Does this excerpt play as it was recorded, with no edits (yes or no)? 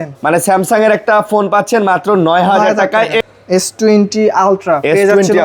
no